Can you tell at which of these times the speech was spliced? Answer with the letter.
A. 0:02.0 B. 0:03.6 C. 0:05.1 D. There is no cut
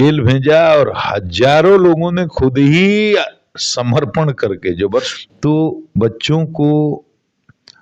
C